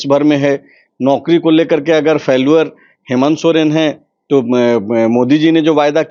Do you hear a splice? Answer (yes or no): no